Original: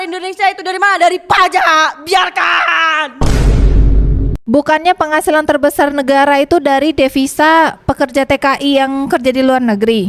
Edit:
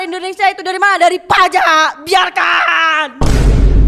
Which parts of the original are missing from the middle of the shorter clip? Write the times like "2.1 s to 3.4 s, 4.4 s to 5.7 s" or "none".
none